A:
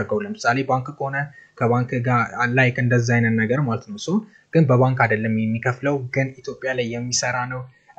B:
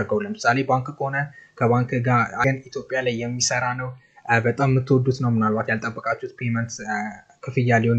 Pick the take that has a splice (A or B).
B